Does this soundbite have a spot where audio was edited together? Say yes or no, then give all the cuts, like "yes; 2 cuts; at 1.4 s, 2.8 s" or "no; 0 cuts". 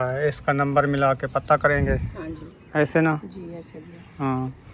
no; 0 cuts